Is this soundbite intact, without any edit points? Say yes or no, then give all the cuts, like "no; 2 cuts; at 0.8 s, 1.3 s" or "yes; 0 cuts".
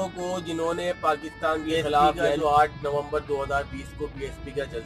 no; 1 cut; at 2.3 s